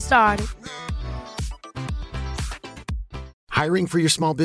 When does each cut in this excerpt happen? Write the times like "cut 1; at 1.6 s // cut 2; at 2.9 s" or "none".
cut 1; at 3.4 s

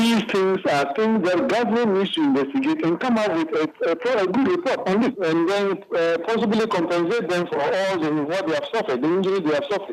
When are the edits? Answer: cut 1; at 5.2 s // cut 2; at 7.5 s

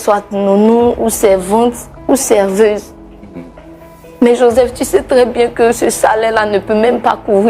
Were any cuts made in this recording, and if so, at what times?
none

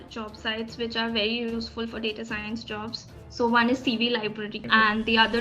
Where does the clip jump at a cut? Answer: cut 1; at 4.5 s

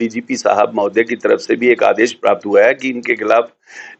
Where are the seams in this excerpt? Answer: none

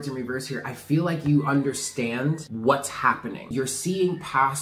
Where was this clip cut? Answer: cut 1; at 2.5 s // cut 2; at 3.5 s

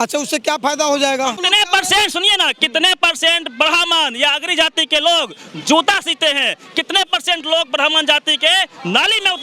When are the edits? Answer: cut 1; at 1.4 s

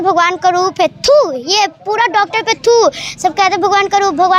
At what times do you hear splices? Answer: none

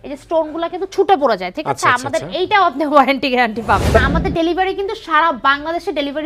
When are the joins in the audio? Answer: cut 1; at 4.0 s

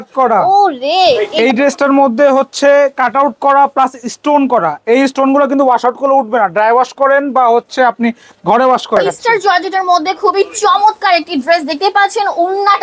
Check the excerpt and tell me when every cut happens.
cut 1; at 1.3 s // cut 2; at 9.2 s

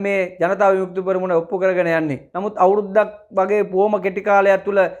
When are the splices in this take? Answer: cut 1; at 2.2 s

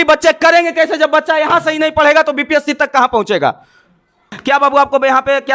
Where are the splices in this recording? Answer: cut 1; at 4.3 s

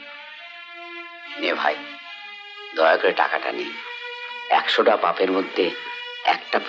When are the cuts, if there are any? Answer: none

